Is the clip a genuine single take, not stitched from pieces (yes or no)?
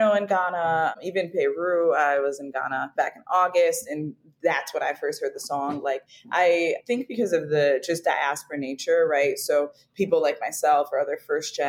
yes